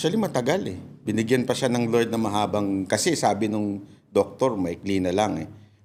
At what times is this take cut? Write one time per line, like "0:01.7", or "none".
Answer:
none